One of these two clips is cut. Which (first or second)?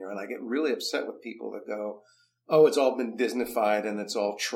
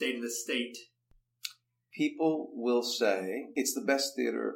second